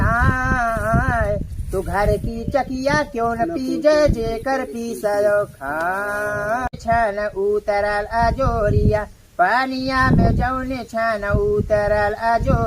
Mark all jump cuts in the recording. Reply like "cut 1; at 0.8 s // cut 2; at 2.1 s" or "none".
cut 1; at 6.7 s